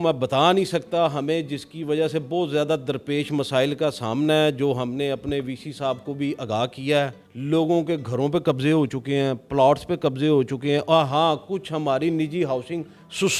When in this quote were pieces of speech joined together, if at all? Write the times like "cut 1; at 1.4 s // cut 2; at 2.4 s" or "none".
none